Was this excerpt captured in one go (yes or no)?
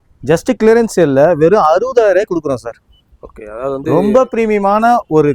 yes